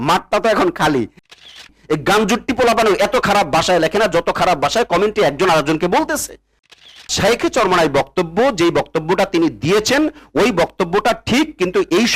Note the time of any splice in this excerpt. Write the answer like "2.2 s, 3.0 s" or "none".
1.5 s, 7.0 s